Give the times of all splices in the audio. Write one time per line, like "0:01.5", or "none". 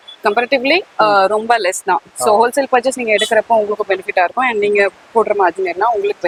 none